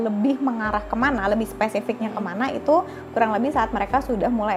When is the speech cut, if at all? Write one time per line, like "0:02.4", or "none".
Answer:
none